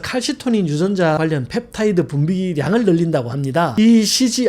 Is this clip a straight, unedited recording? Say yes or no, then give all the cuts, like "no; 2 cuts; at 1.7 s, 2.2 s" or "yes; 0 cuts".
no; 2 cuts; at 1.2 s, 3.7 s